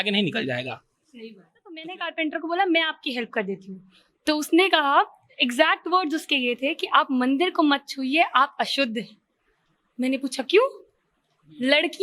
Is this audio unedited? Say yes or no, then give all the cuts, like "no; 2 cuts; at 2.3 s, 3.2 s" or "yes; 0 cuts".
no; 1 cut; at 1.9 s